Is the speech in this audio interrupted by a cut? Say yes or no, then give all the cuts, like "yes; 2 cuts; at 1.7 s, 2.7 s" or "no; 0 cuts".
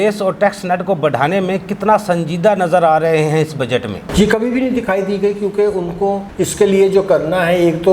no; 0 cuts